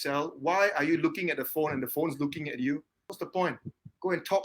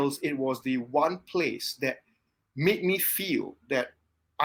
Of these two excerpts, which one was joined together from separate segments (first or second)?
first